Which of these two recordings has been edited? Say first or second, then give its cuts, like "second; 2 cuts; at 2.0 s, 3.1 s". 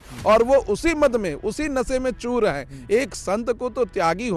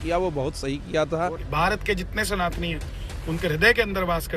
second; 1 cut; at 1.4 s